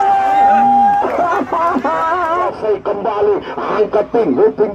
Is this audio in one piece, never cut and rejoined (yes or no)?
no